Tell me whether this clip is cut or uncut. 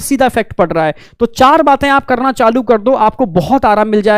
uncut